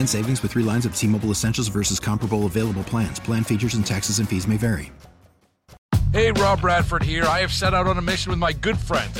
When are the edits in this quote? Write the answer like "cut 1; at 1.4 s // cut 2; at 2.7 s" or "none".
cut 1; at 5.8 s